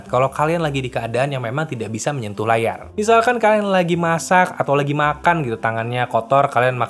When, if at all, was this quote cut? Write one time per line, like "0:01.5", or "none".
none